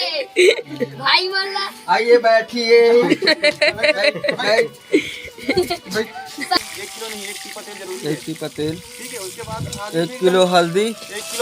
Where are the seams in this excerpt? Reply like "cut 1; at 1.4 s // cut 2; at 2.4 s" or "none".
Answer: cut 1; at 6.6 s

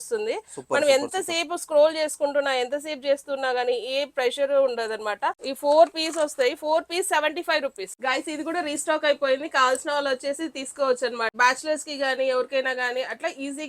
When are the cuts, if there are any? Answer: cut 1; at 5.5 s // cut 2; at 7.9 s // cut 3; at 11.3 s

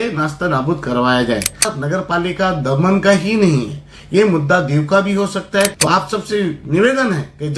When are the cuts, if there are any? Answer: cut 1; at 1.7 s // cut 2; at 5.7 s

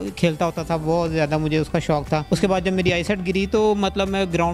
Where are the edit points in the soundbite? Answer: cut 1; at 2.2 s

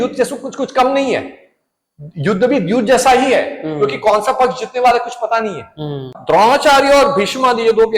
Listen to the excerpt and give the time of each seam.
cut 1; at 6.1 s

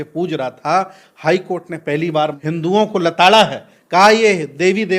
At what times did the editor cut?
cut 1; at 2.4 s

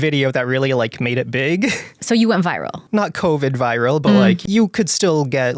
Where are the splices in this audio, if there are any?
cut 1; at 1.9 s // cut 2; at 2.8 s // cut 3; at 4.4 s

